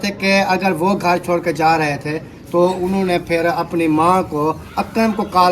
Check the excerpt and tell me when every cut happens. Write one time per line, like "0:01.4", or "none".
none